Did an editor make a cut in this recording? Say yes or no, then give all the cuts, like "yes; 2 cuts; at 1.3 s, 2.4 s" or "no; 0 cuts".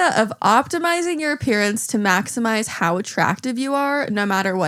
no; 0 cuts